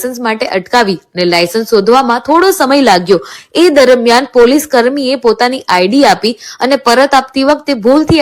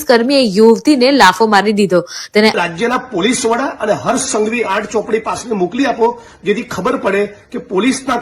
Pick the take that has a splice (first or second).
second